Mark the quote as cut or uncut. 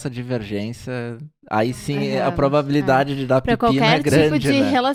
uncut